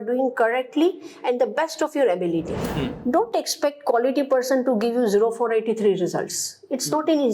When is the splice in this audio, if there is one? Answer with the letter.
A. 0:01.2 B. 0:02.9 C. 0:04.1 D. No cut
B